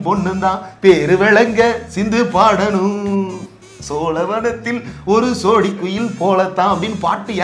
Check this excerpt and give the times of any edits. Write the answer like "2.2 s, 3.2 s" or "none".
none